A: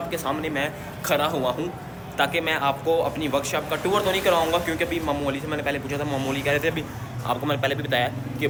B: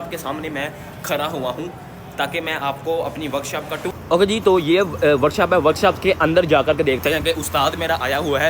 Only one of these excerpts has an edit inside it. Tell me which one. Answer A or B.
B